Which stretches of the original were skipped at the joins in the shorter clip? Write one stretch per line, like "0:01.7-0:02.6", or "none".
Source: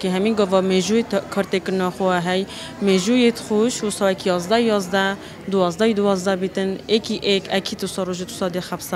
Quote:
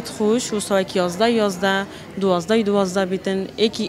none